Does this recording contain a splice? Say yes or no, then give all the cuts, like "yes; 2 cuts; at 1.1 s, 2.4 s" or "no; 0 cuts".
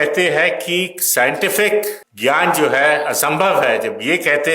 yes; 1 cut; at 2.0 s